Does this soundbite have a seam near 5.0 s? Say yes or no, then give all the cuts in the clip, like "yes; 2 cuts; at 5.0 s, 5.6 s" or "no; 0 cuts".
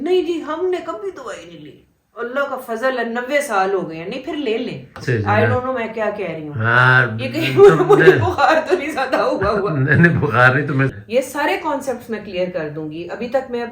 yes; 2 cuts; at 5.0 s, 10.9 s